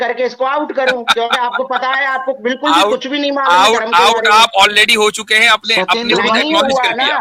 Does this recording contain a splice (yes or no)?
no